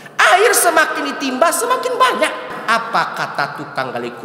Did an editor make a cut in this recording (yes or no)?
yes